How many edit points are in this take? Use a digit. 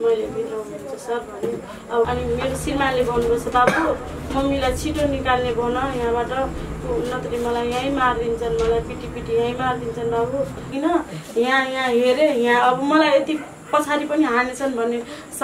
2